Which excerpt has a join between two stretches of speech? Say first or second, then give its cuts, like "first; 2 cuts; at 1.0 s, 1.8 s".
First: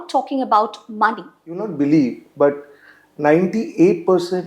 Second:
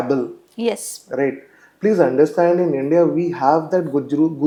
first; 1 cut; at 1.7 s